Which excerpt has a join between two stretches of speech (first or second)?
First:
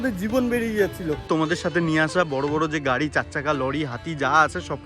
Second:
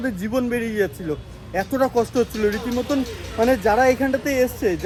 first